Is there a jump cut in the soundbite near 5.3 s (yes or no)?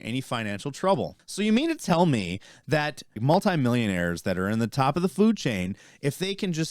no